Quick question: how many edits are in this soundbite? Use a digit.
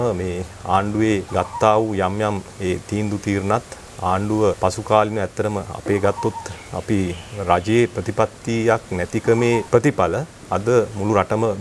3